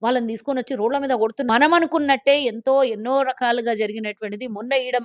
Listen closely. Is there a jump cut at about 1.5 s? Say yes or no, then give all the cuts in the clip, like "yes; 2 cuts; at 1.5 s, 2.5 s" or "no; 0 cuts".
yes; 1 cut; at 1.5 s